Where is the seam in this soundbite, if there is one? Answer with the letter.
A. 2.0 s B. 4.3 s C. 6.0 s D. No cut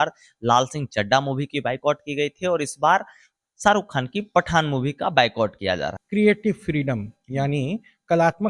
C